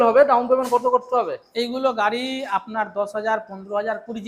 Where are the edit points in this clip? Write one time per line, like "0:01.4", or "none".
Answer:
none